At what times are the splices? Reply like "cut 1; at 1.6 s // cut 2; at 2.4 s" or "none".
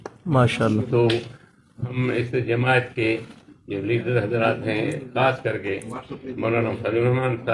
none